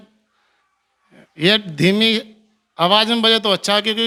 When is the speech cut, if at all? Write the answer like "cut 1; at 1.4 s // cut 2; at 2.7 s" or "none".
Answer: none